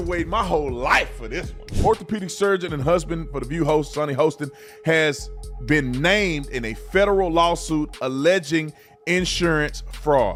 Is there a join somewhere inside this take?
no; 0 cuts

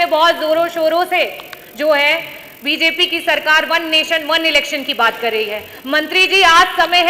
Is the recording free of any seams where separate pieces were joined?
yes; 0 cuts

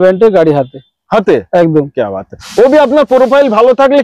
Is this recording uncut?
yes; 0 cuts

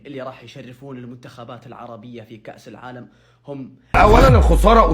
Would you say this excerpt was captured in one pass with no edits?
no; 1 cut; at 3.9 s

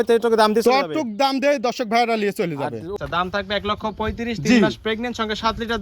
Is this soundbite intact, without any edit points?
no; 1 cut; at 2.9 s

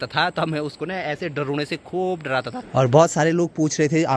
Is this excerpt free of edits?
no; 1 cut; at 2.6 s

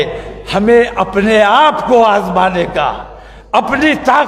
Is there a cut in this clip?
no; 0 cuts

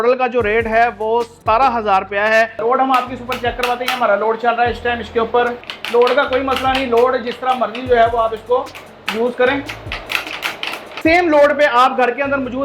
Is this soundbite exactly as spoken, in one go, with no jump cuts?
no; 3 cuts; at 2.6 s, 5.7 s, 11.0 s

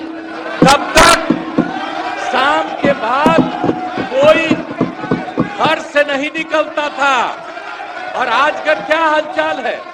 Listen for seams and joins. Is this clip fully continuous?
yes; 0 cuts

